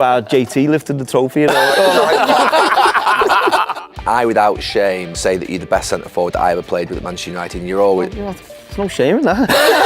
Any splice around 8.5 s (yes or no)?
no